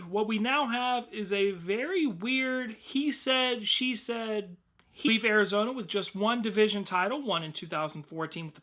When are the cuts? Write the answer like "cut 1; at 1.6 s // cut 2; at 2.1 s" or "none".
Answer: none